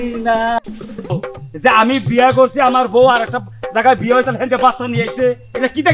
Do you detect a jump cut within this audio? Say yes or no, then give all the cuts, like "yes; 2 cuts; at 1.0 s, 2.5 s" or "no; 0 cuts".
yes; 1 cut; at 1.1 s